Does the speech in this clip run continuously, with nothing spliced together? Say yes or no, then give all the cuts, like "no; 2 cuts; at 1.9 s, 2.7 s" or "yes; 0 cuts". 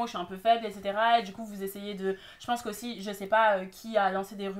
yes; 0 cuts